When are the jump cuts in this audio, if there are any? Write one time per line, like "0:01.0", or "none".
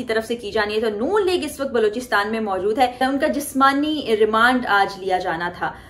0:03.0